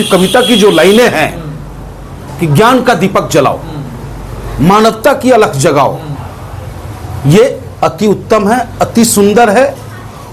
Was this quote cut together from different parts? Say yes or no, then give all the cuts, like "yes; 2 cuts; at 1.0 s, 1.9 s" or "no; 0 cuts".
no; 0 cuts